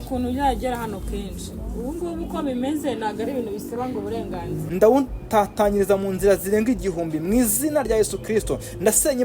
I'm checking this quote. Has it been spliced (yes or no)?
yes